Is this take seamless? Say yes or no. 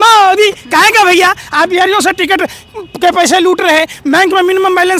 yes